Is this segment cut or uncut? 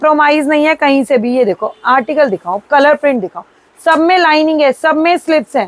uncut